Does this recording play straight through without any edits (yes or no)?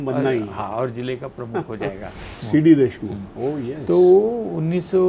no